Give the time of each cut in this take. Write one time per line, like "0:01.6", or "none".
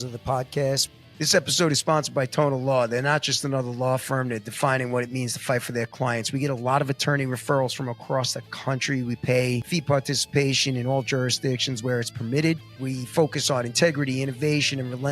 0:01.0